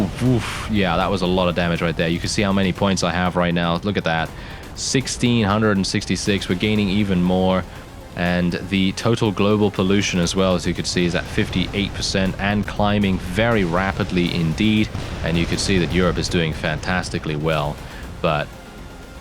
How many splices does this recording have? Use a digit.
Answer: 1